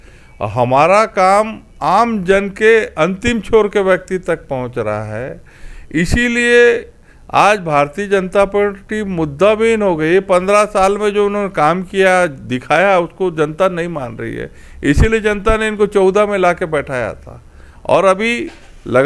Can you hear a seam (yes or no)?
no